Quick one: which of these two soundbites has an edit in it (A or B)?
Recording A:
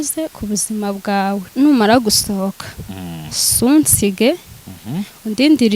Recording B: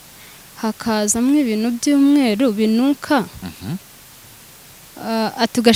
A